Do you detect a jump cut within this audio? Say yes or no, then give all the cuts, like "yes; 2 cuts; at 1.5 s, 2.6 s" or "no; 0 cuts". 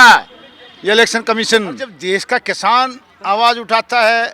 yes; 1 cut; at 2.0 s